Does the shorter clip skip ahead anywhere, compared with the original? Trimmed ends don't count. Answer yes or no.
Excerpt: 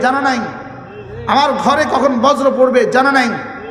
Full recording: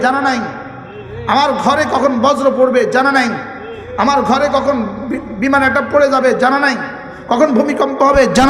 no